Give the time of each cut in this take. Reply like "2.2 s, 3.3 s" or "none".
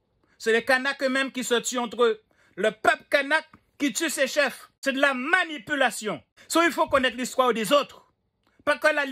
4.7 s, 6.3 s